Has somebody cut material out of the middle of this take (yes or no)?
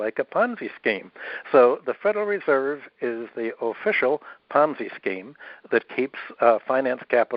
no